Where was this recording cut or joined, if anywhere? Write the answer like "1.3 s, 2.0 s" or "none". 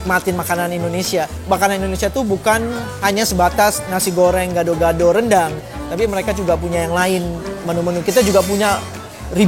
1.4 s